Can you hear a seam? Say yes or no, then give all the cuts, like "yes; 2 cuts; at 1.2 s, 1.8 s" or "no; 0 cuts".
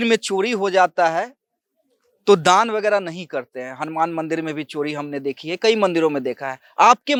no; 0 cuts